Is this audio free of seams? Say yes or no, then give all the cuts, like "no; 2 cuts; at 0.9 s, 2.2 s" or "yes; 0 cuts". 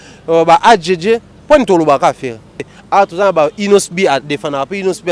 no; 1 cut; at 2.8 s